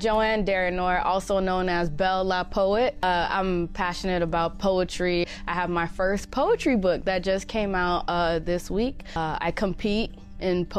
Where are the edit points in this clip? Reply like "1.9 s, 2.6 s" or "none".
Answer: 3.0 s, 9.2 s